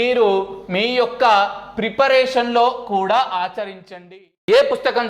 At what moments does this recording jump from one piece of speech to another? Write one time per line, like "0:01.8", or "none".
0:04.1